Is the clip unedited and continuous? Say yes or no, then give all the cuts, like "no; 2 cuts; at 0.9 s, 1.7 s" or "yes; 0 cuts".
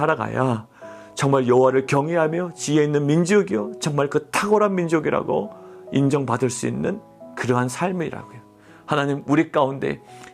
yes; 0 cuts